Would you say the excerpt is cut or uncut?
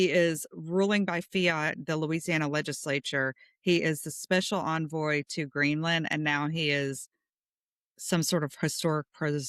uncut